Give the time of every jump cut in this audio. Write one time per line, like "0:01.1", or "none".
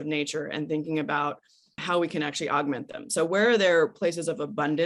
0:01.8